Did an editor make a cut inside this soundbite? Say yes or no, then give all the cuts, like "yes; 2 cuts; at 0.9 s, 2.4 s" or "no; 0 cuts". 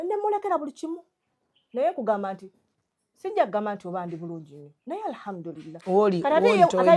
no; 0 cuts